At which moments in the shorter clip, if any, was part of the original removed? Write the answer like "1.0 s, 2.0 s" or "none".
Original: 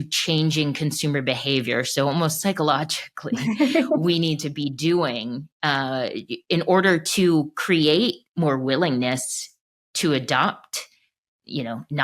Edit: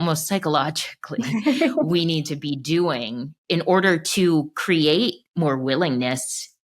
3.3 s